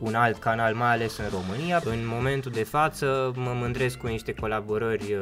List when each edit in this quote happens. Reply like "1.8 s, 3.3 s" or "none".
1.8 s